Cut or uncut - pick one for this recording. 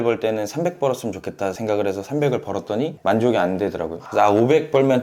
cut